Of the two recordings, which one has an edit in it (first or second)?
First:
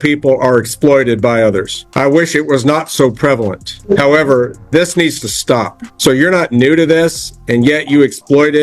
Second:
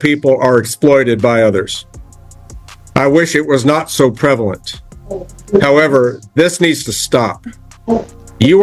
first